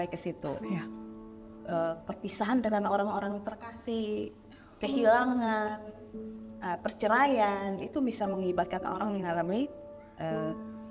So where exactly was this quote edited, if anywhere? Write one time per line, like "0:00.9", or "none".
none